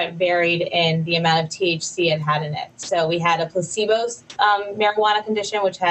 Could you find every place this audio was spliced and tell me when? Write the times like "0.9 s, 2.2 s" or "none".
4.2 s